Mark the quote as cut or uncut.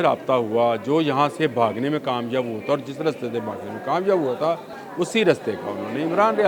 cut